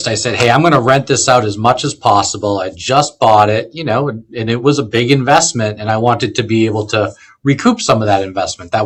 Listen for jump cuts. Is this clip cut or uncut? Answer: uncut